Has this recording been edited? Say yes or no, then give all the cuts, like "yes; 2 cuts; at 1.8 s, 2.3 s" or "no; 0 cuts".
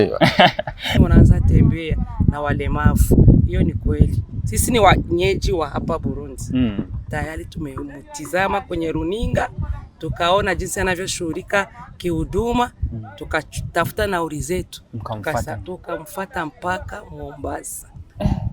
yes; 1 cut; at 1.0 s